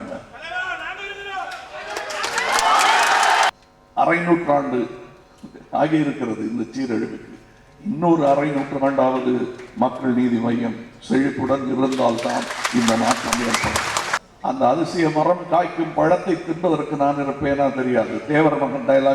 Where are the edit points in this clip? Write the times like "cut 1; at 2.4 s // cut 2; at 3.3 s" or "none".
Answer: cut 1; at 3.5 s // cut 2; at 14.2 s